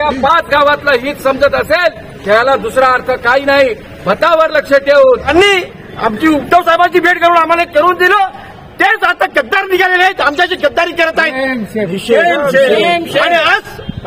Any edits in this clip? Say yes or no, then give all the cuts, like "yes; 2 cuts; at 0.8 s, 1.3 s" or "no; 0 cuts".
yes; 1 cut; at 5.3 s